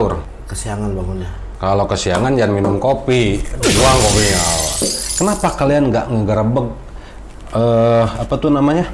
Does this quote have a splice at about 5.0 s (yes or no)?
yes